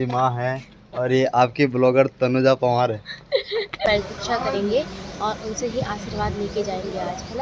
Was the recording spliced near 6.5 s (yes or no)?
no